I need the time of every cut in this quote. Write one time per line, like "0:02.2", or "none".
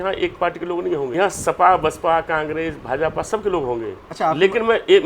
0:01.1
0:04.0